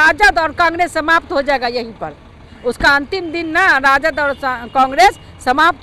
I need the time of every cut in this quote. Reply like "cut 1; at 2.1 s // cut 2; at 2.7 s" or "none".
none